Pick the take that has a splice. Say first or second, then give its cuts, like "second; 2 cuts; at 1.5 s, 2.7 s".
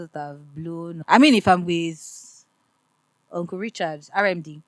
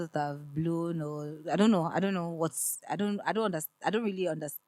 first; 1 cut; at 1.0 s